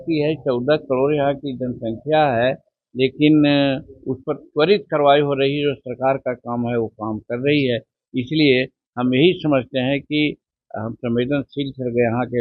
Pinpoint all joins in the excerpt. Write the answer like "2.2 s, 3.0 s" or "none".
none